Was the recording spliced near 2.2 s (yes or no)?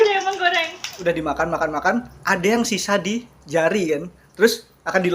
no